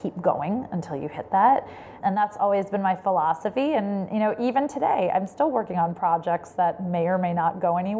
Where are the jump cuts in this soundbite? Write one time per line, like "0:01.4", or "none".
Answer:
0:01.9